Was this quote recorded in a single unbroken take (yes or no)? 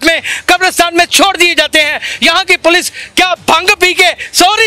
yes